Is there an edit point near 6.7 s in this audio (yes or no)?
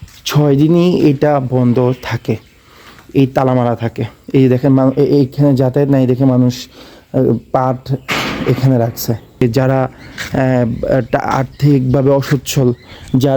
no